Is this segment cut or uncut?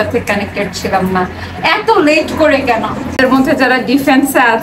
cut